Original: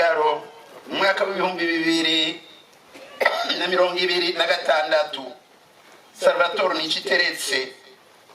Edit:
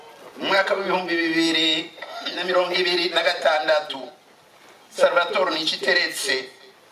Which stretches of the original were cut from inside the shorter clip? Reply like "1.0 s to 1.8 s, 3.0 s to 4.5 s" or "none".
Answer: 2.8 s to 3.5 s